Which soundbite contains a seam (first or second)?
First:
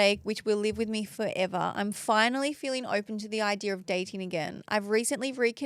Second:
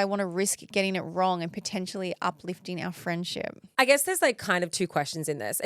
second